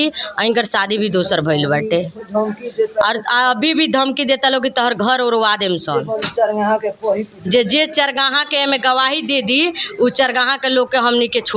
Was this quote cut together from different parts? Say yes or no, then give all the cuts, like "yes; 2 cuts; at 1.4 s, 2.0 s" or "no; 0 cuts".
no; 0 cuts